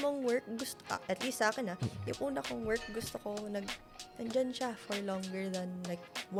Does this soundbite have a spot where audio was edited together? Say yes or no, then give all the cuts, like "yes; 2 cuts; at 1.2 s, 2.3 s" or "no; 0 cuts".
no; 0 cuts